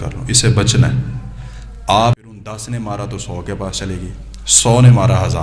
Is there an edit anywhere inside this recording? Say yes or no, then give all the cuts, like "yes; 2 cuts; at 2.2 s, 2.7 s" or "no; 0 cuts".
yes; 1 cut; at 2.2 s